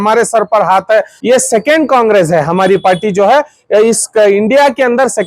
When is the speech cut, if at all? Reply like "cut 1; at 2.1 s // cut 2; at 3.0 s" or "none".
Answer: cut 1; at 1.1 s

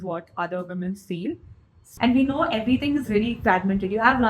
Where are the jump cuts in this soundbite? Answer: cut 1; at 1.8 s

